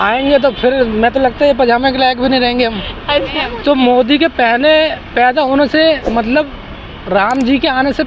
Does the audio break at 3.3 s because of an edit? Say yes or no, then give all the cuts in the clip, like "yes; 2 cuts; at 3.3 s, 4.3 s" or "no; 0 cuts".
yes; 1 cut; at 3.3 s